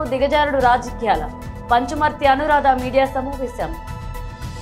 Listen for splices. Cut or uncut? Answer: cut